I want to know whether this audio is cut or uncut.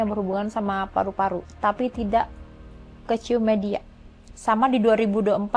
uncut